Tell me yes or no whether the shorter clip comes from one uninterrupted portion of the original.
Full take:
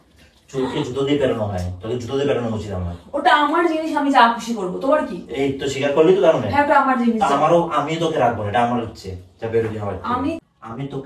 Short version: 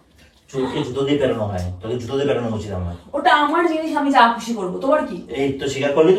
yes